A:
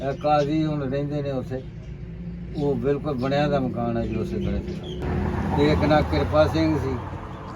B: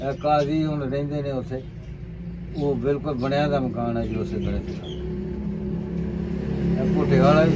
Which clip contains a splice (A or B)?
A